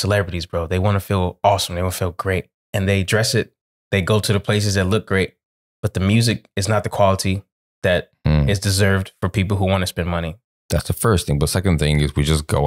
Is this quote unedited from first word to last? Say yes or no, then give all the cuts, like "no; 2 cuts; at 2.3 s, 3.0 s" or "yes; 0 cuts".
no; 2 cuts; at 2.6 s, 10.5 s